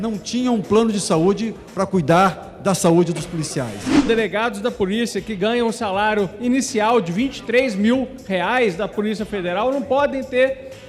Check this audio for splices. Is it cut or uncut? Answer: cut